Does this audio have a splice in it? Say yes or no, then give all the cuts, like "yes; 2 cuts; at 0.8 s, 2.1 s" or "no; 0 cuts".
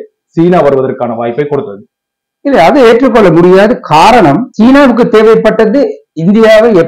no; 0 cuts